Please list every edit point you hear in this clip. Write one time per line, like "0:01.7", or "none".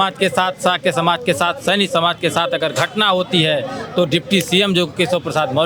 none